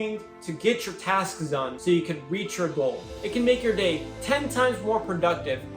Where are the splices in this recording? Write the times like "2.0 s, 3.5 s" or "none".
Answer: 1.7 s, 3.1 s